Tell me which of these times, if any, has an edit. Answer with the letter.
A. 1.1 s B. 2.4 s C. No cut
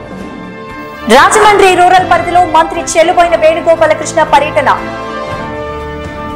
A